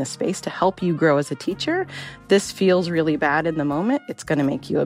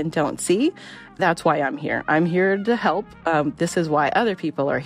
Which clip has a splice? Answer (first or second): second